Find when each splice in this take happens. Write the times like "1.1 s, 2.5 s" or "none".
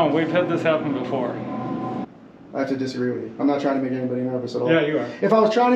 2.0 s